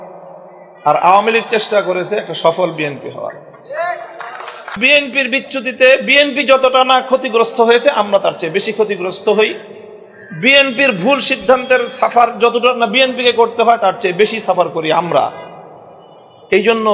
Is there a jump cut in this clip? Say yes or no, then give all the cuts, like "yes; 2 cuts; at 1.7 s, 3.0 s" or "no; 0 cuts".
yes; 1 cut; at 4.8 s